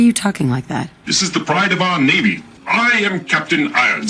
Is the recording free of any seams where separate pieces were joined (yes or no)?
no